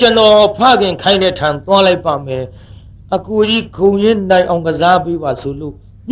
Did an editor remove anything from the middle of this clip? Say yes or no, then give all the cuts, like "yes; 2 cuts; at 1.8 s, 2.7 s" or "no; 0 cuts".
no; 0 cuts